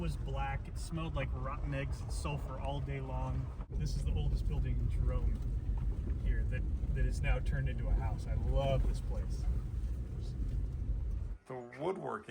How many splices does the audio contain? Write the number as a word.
two